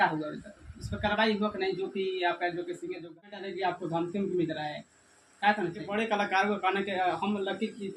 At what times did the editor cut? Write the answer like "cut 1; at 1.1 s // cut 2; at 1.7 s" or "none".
cut 1; at 3.3 s // cut 2; at 5.9 s